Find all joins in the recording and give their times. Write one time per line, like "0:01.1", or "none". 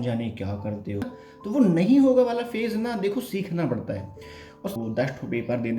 0:01.1
0:04.7